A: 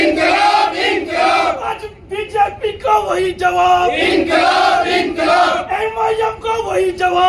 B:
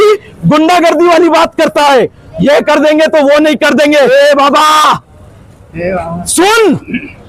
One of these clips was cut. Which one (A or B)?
B